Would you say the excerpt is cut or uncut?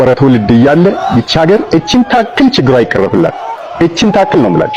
uncut